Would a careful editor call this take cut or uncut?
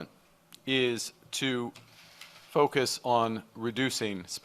uncut